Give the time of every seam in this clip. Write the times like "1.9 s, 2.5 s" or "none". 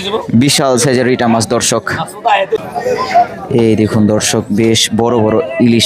2.6 s